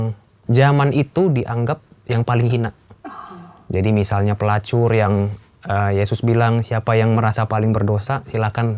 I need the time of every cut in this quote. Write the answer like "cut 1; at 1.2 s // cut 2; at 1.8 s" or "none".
none